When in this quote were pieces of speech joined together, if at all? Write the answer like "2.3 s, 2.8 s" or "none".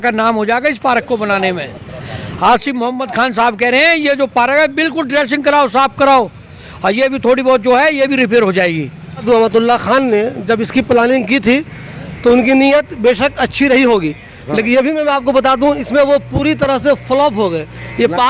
none